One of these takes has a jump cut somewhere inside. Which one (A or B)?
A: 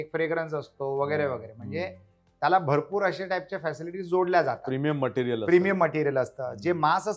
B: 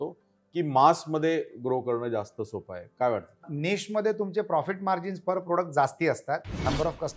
B